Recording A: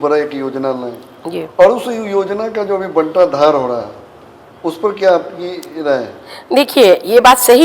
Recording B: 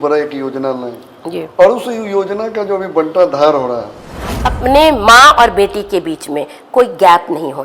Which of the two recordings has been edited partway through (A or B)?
B